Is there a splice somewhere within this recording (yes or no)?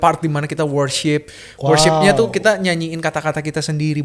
no